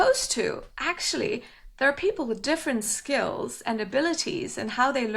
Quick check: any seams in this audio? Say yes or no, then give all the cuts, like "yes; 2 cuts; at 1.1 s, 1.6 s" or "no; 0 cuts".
no; 0 cuts